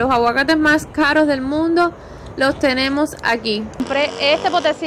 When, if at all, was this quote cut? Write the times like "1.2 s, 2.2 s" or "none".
3.8 s